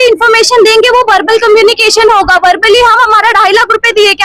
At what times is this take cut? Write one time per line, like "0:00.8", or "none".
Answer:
none